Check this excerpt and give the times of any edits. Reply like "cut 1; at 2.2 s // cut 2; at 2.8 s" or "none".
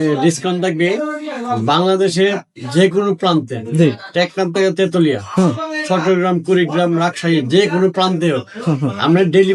none